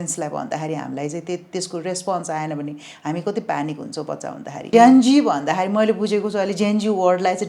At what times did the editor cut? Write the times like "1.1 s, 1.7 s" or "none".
4.6 s